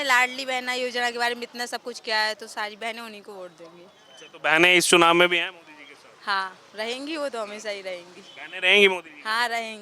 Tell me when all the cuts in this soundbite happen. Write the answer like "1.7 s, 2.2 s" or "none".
none